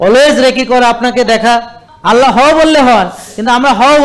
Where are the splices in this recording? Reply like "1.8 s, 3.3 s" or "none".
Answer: 1.9 s

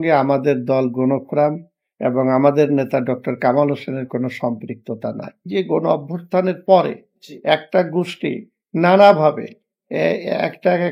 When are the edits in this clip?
5.5 s

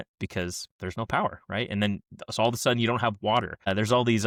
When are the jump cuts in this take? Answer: none

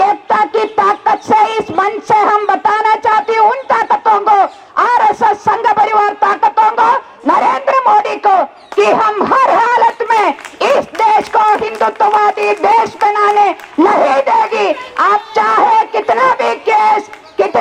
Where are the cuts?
none

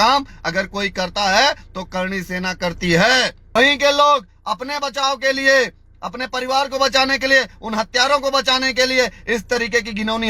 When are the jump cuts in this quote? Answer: 3.6 s

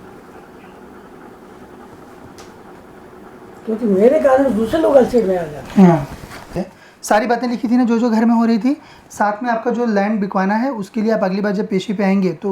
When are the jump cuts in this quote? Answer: 6.6 s

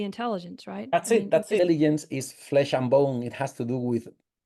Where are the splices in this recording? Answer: 1.6 s

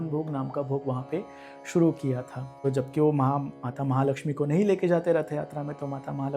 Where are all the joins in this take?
2.6 s

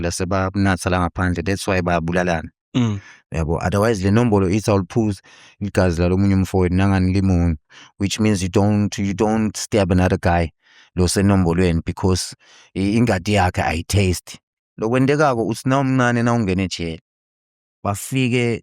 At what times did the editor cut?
14.5 s

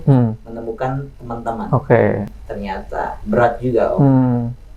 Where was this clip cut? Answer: 2.3 s

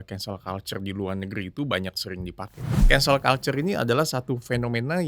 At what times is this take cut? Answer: 2.7 s

